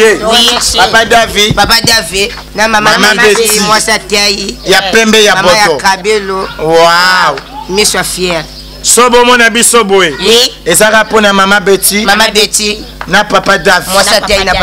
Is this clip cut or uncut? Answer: cut